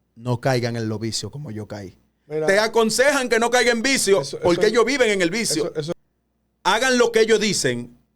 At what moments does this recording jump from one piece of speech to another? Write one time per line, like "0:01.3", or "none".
0:05.9